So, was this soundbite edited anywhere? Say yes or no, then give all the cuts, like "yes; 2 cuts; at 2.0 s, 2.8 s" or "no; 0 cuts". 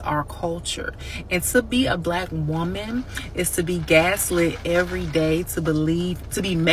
no; 0 cuts